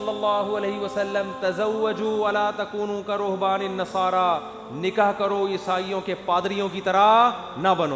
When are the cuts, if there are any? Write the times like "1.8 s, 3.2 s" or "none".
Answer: none

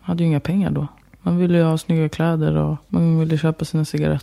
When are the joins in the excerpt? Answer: 2.8 s

